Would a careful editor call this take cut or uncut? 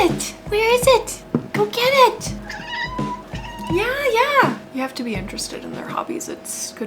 cut